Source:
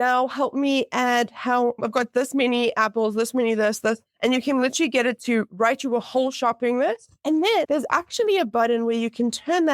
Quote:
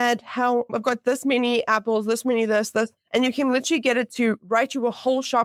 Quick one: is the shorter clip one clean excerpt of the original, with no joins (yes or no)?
yes